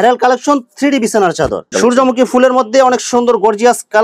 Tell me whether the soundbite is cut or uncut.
cut